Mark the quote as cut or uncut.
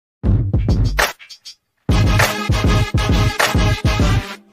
uncut